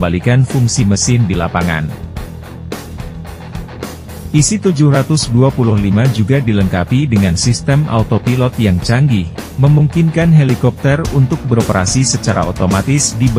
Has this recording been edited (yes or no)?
yes